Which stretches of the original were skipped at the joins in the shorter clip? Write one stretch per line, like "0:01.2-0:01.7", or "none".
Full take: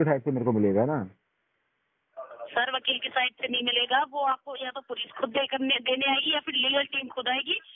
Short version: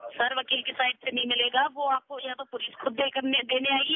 none

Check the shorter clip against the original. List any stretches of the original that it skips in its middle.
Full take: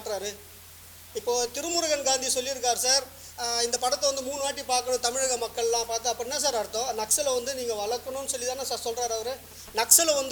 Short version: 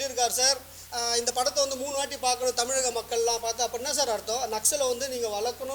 none

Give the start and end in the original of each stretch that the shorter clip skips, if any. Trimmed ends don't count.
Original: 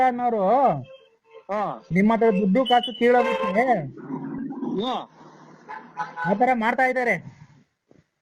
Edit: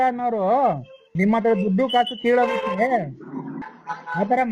0:01.0-0:01.8
0:04.4-0:05.7

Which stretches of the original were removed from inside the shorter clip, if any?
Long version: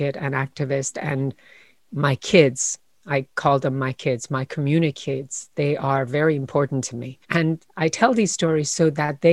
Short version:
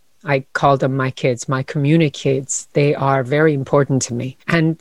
none

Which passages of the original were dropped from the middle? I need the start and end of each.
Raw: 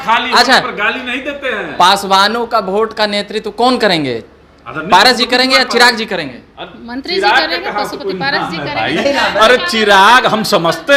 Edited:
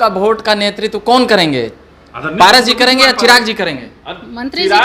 none

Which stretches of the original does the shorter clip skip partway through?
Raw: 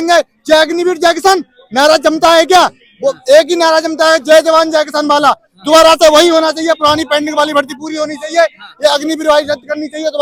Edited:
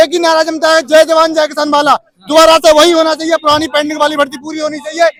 none

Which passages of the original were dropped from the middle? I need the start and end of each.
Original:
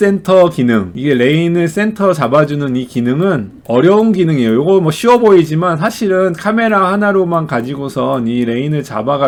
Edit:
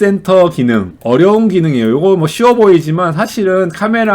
0:00.9-0:03.6

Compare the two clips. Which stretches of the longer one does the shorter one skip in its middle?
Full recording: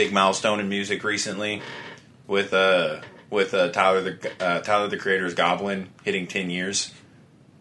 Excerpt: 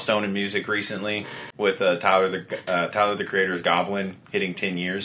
0:01.8-0:03.1

